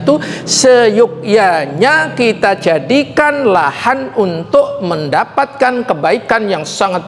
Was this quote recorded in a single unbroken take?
yes; 0 cuts

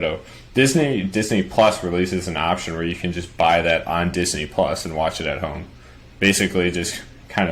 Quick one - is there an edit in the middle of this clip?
no; 0 cuts

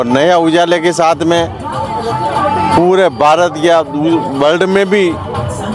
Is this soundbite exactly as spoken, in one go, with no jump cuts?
yes; 0 cuts

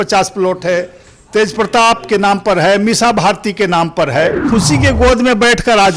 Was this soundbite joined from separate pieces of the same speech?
yes; 1 cut; at 4.5 s

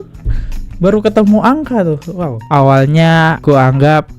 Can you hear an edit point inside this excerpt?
yes; 1 cut; at 2.4 s

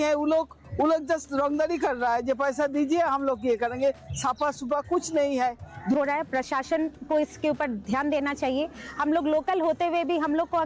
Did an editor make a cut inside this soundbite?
yes; 1 cut; at 5.9 s

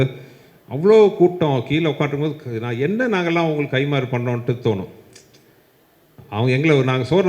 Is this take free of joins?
yes; 0 cuts

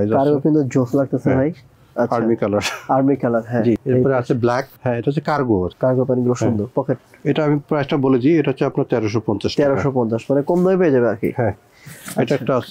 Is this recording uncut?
yes; 0 cuts

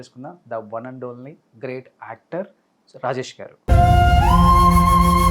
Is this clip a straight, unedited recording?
yes; 0 cuts

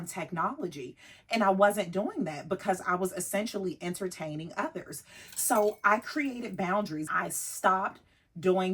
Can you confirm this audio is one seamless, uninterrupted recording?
no; 1 cut; at 7.1 s

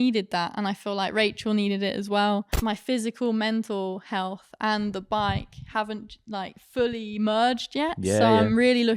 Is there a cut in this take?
yes; 1 cut; at 2.5 s

